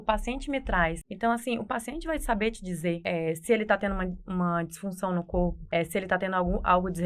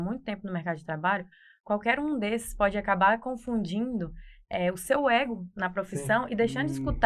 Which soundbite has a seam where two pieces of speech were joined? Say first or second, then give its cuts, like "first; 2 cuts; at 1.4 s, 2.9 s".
first; 3 cuts; at 1.1 s, 3.0 s, 5.6 s